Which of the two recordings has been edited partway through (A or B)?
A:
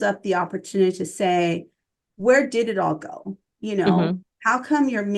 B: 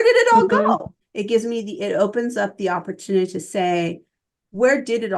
B